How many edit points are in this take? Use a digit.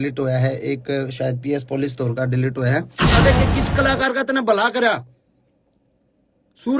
1